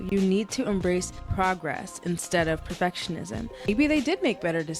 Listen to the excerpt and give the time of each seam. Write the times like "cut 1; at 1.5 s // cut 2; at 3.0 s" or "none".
cut 1; at 1.2 s // cut 2; at 3.7 s